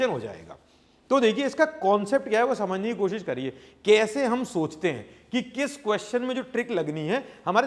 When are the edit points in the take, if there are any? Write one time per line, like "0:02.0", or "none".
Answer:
none